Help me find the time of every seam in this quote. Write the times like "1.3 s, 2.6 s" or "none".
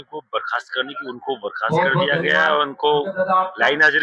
none